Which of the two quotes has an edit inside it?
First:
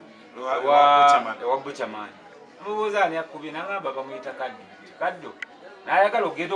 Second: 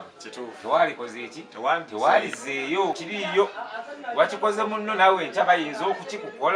second; 1 cut; at 3.0 s

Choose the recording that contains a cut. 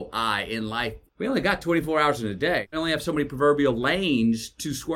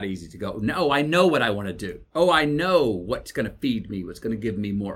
first; 2 cuts; at 1.0 s, 2.7 s

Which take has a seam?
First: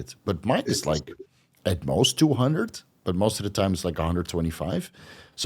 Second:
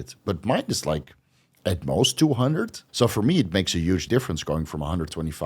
second; 2 cuts; at 2.8 s, 4.0 s

